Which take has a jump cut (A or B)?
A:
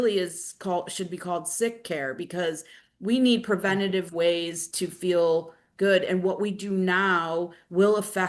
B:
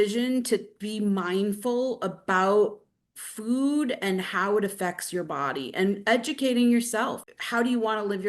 B